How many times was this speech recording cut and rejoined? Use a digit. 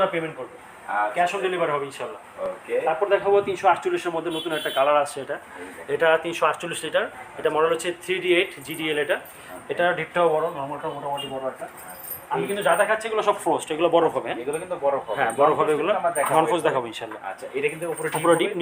0